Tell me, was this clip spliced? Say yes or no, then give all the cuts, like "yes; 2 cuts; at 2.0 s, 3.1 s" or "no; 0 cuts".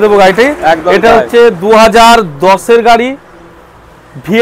no; 0 cuts